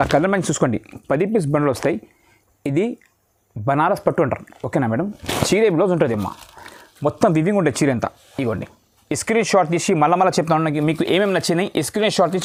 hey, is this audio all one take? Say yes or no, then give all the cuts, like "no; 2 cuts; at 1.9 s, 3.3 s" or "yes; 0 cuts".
yes; 0 cuts